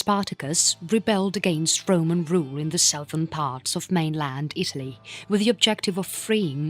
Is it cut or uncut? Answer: cut